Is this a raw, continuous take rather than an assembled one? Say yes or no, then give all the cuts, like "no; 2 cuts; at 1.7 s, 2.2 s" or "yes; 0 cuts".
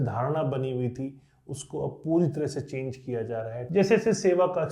no; 1 cut; at 3.6 s